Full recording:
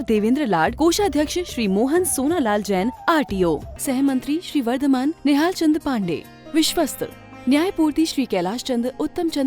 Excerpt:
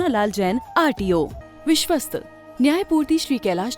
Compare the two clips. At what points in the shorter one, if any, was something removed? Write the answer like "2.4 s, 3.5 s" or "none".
1.4 s